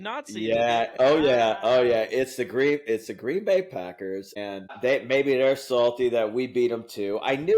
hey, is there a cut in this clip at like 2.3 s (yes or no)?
no